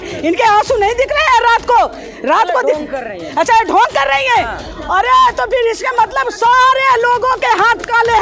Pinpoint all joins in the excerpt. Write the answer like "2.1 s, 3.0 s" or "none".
none